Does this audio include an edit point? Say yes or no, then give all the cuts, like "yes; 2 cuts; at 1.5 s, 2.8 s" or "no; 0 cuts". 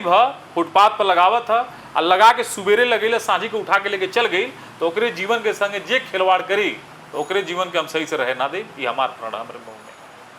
no; 0 cuts